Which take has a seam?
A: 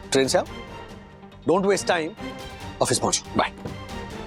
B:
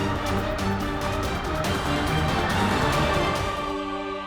B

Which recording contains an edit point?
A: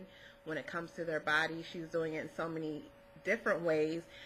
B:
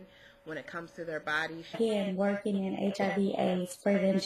A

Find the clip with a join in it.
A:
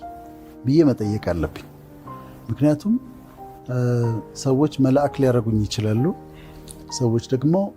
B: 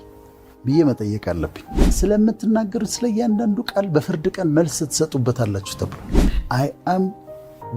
B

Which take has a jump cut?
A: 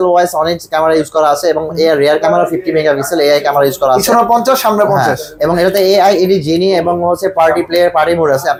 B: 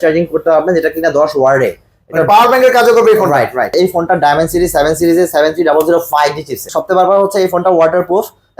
B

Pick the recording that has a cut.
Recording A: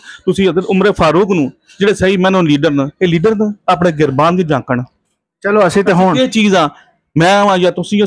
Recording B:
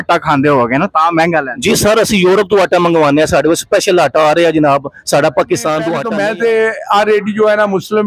B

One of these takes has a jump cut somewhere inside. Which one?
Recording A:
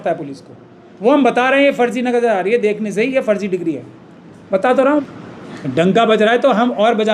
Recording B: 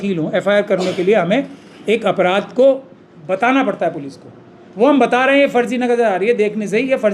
A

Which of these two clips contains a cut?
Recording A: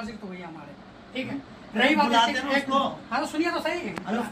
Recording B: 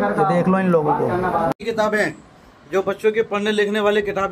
B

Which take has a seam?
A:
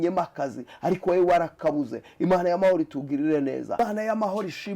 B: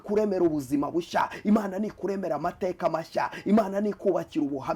A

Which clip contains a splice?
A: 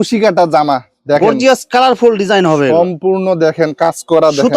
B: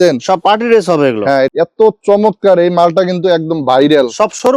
B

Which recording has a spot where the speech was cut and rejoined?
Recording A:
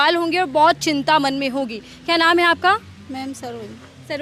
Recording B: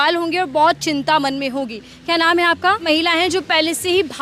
B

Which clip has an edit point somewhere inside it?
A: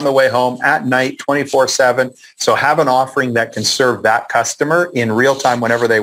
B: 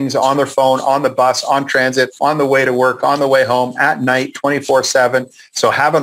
B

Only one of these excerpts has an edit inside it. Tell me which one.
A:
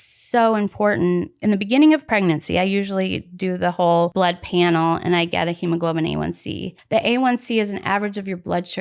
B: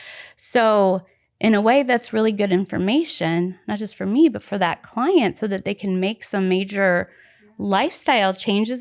A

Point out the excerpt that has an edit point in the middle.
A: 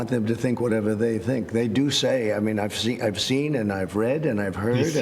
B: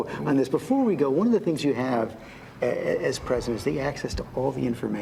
A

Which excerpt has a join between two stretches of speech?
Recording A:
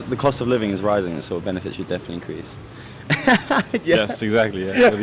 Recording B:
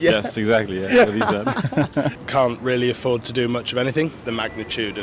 B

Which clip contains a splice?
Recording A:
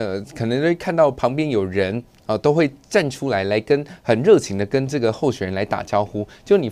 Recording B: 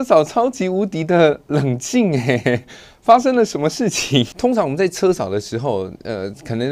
B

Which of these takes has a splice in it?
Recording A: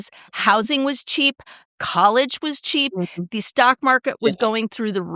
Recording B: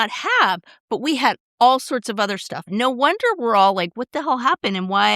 B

